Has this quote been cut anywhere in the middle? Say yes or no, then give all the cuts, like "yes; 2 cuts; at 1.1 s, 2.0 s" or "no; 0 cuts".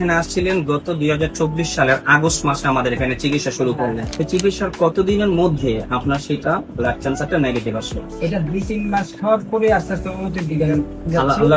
yes; 1 cut; at 4.1 s